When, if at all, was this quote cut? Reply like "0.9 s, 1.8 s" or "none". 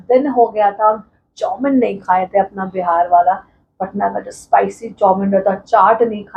none